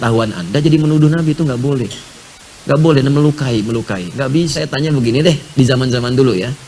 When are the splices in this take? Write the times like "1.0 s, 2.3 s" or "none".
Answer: 4.6 s